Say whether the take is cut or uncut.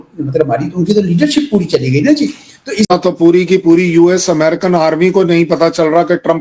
cut